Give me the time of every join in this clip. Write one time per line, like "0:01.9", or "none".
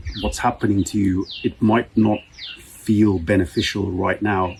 none